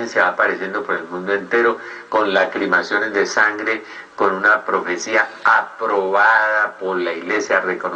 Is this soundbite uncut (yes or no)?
no